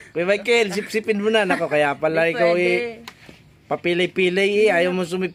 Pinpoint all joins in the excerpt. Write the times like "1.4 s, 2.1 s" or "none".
none